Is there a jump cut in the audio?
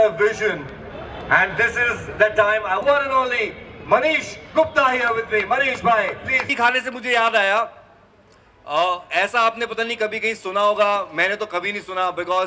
yes; 2 cuts; at 2.8 s, 6.5 s

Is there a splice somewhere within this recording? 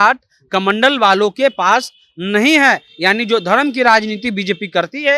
no; 0 cuts

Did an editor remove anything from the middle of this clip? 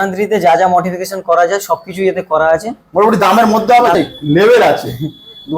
yes; 1 cut; at 3.9 s

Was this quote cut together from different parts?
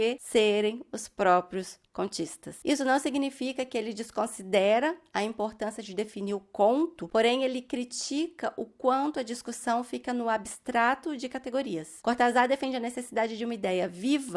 no; 0 cuts

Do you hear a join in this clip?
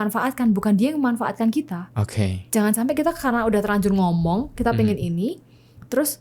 no; 0 cuts

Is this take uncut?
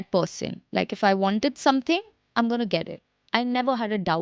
yes; 0 cuts

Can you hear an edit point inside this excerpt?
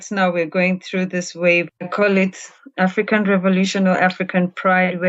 yes; 1 cut; at 1.7 s

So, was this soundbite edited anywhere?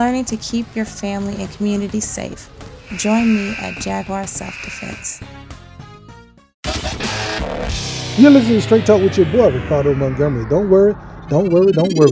yes; 1 cut; at 6.5 s

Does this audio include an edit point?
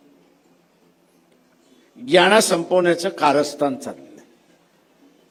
no; 0 cuts

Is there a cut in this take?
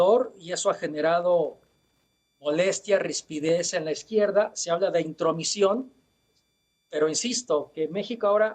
no; 0 cuts

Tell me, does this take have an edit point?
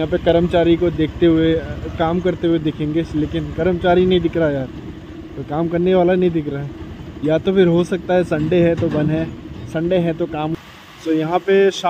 yes; 1 cut; at 10.6 s

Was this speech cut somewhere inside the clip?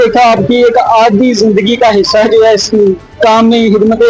no; 0 cuts

